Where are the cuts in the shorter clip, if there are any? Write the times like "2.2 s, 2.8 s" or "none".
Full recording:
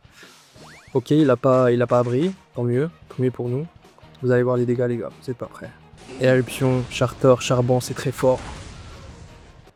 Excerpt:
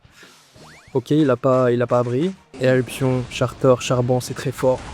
2.4 s